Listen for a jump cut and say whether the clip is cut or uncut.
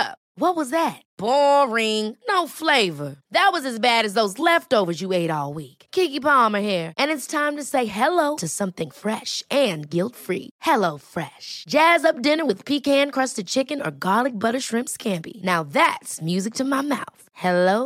uncut